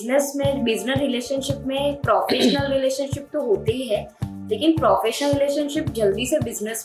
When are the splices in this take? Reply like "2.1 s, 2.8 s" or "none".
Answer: none